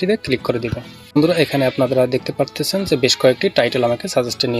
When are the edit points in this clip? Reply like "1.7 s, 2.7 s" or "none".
1.2 s